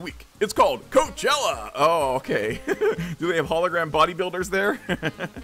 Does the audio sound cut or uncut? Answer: uncut